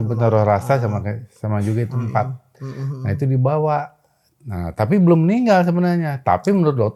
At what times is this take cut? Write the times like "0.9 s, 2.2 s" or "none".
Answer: none